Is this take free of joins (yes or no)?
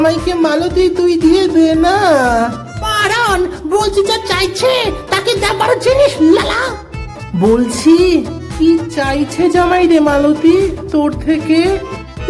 yes